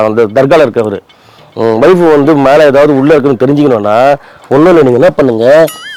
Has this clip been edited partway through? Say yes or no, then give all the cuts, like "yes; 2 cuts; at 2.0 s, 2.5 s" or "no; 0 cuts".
no; 0 cuts